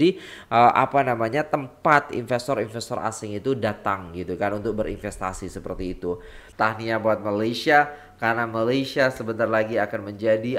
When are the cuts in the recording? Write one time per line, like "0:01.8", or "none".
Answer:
0:06.4